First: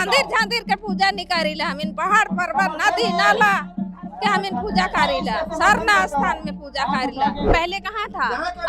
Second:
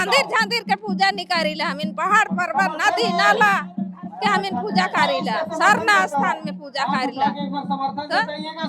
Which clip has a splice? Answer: first; 1 cut; at 7.5 s

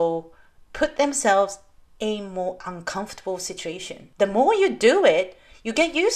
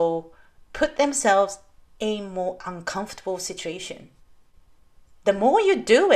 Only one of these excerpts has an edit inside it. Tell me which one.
first; 1 cut; at 4.0 s

